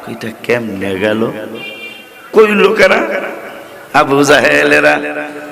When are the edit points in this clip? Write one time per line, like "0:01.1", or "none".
0:02.3